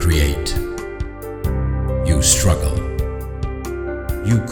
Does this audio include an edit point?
no; 0 cuts

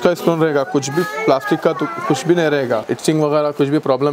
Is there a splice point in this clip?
yes; 1 cut; at 2.9 s

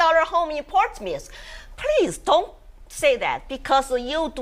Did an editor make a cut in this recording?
no; 0 cuts

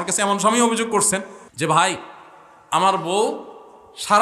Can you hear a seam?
yes; 1 cut; at 1.4 s

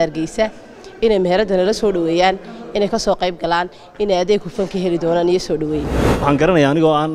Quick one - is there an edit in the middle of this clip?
yes; 1 cut; at 6.0 s

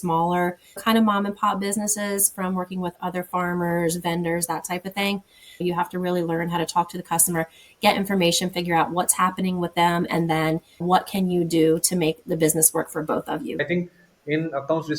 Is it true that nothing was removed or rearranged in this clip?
no; 2 cuts; at 5.6 s, 13.6 s

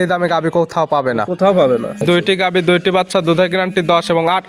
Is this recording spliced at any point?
yes; 1 cut; at 1.9 s

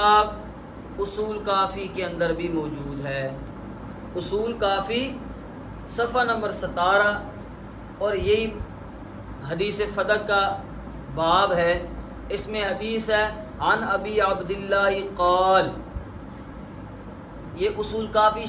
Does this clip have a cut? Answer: no; 0 cuts

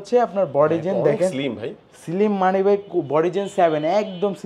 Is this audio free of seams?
yes; 0 cuts

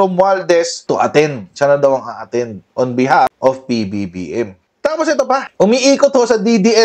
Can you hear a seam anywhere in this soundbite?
yes; 1 cut; at 4.6 s

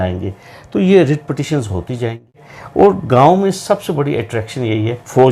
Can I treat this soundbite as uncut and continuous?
no; 1 cut; at 2.5 s

